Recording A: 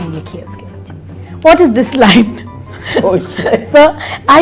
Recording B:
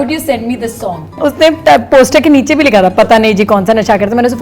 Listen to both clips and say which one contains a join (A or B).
B